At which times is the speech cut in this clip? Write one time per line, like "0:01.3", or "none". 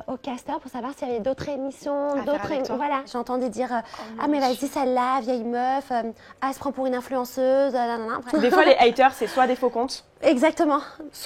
0:03.1
0:08.1